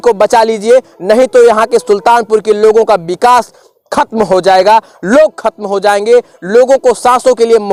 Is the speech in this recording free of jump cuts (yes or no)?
yes